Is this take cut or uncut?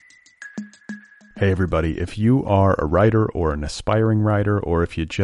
cut